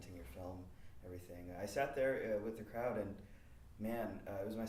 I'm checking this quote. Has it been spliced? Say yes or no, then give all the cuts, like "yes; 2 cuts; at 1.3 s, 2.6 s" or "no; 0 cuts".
no; 0 cuts